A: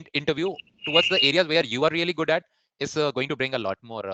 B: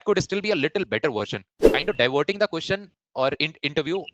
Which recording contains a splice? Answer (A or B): B